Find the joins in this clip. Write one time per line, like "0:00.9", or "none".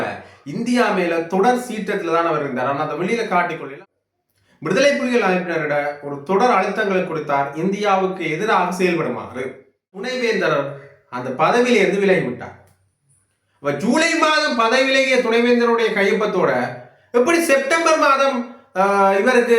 0:03.7
0:10.1